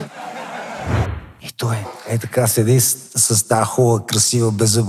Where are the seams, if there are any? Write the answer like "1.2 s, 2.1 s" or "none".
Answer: 1.1 s